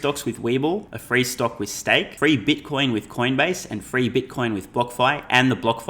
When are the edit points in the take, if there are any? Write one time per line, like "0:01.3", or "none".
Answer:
0:00.9
0:02.1